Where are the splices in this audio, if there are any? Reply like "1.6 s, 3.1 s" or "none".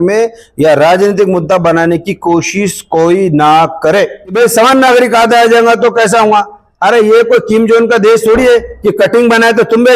4.3 s